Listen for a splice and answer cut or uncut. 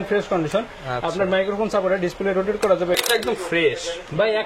cut